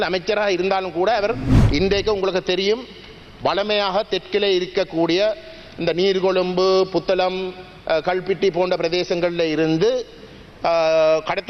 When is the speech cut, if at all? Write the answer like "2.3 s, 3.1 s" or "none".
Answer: 1.5 s